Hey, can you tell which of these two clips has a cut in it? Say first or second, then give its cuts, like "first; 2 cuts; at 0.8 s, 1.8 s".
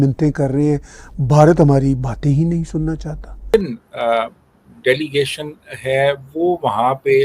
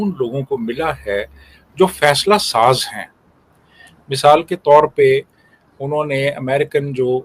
first; 1 cut; at 3.5 s